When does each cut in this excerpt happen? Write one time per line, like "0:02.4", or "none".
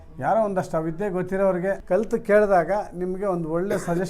0:01.8